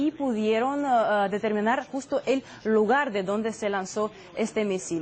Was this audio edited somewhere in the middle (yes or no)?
no